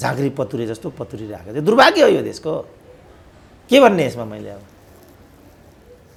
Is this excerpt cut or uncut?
uncut